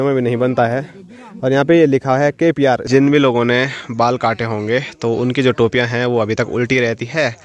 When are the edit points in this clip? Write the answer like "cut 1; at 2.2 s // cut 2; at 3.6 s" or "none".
cut 1; at 2.8 s